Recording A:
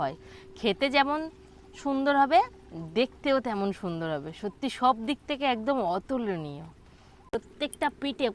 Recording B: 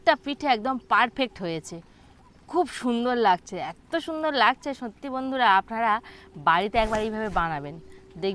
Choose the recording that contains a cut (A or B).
A